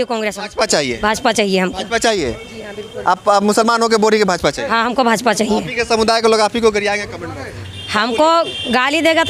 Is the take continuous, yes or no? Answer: yes